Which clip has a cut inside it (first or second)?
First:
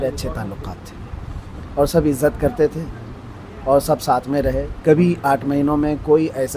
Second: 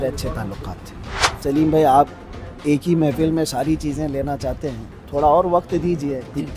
second